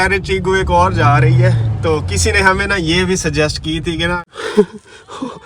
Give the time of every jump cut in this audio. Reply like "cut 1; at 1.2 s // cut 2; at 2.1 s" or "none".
cut 1; at 4.2 s

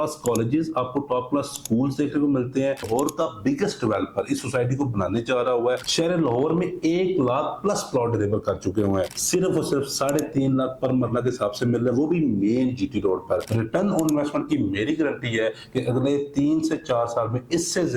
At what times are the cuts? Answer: cut 1; at 2.9 s // cut 2; at 5.9 s // cut 3; at 9.2 s // cut 4; at 13.5 s

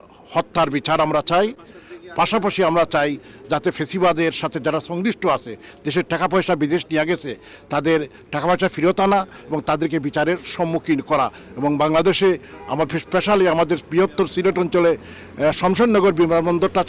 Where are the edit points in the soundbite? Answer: none

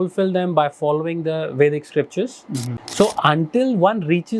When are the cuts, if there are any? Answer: cut 1; at 2.8 s

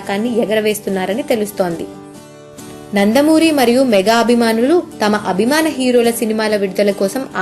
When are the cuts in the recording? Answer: cut 1; at 1.2 s

